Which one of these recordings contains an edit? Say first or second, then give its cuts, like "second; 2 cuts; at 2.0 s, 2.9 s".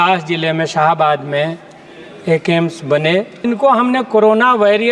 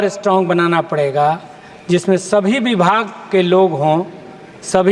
first; 1 cut; at 3.4 s